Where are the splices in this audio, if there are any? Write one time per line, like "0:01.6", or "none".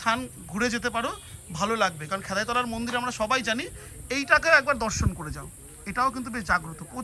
none